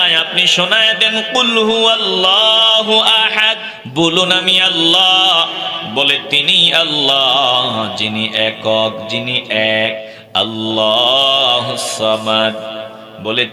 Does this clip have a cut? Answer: yes; 2 cuts; at 3.7 s, 10.1 s

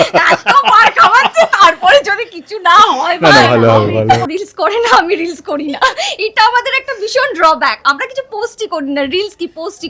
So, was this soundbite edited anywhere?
yes; 1 cut; at 4.2 s

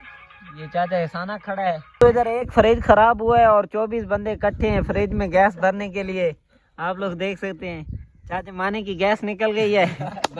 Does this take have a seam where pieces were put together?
yes; 1 cut; at 1.9 s

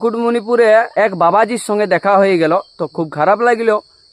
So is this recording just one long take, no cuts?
no; 1 cut; at 1.0 s

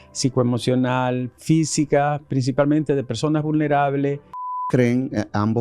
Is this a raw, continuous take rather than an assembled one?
no; 1 cut; at 4.6 s

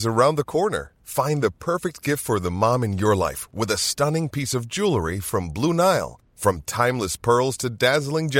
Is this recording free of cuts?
yes; 0 cuts

